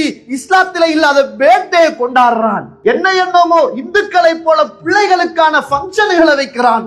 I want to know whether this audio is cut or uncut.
uncut